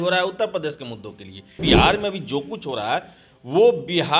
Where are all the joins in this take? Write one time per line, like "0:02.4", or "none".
0:01.6